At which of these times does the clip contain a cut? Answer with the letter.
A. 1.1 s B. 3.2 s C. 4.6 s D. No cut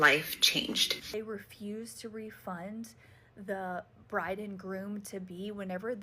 A